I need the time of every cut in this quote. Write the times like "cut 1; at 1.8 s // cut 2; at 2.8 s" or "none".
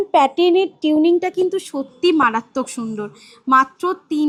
none